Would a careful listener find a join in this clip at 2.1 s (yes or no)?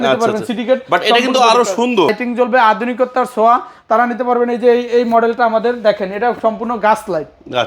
yes